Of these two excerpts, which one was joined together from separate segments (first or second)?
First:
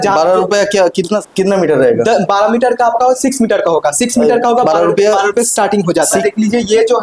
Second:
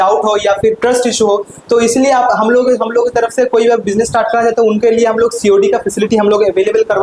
first